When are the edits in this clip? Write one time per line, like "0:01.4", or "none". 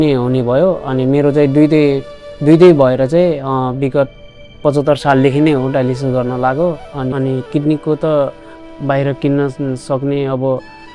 0:07.1